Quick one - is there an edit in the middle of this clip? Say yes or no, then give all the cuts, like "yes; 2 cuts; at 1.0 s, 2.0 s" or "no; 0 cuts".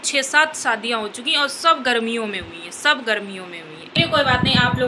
yes; 1 cut; at 3.8 s